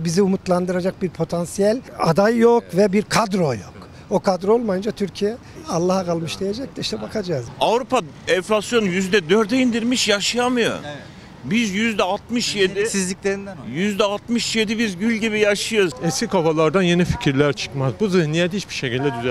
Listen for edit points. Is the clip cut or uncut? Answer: cut